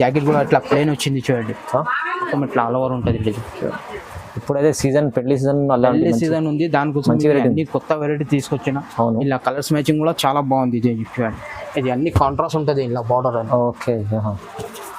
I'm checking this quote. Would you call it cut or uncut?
cut